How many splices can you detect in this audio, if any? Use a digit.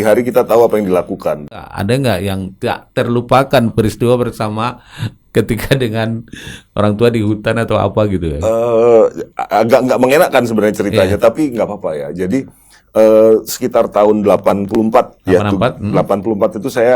1